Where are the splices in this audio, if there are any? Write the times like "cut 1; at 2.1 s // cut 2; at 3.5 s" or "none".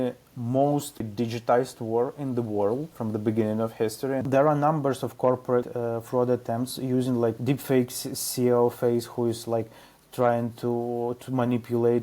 cut 1; at 1.1 s // cut 2; at 2.9 s // cut 3; at 4.2 s // cut 4; at 5.7 s // cut 5; at 7.4 s

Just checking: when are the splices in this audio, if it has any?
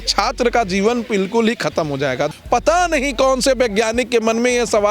cut 1; at 2.3 s

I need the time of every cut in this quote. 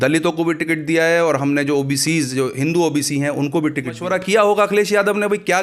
cut 1; at 4.0 s

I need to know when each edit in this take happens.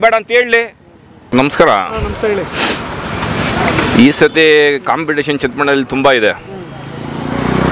cut 1; at 1.3 s

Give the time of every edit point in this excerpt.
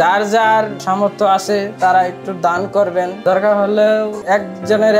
cut 1; at 3.1 s // cut 2; at 4.2 s

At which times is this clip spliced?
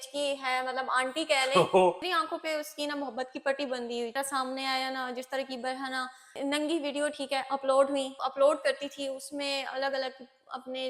cut 1; at 2.1 s // cut 2; at 4.2 s // cut 3; at 8.3 s

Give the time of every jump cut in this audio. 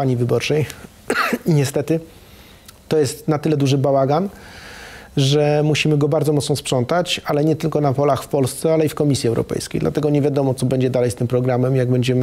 none

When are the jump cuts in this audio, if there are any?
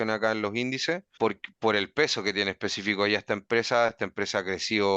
cut 1; at 1.1 s

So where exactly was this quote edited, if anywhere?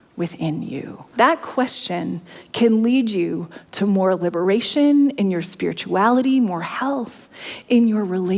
cut 1; at 1.0 s

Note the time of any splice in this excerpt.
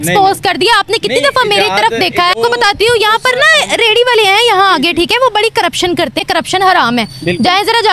cut 1; at 2.3 s // cut 2; at 6.2 s

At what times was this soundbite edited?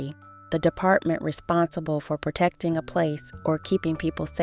none

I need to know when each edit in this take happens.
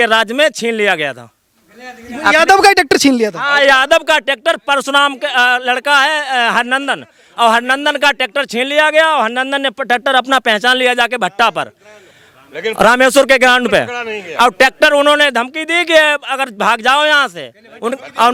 none

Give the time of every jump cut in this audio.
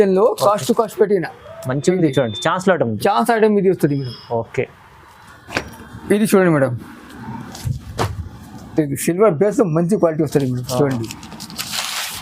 none

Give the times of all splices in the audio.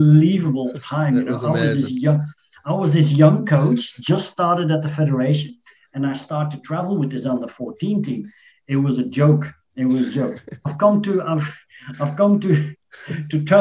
none

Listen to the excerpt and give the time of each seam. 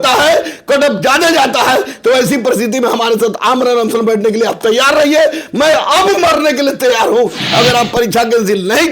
cut 1; at 7.4 s

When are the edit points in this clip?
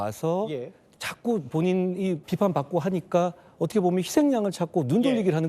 cut 1; at 2.2 s

